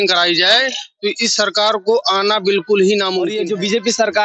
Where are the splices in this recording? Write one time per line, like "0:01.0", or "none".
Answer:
0:03.3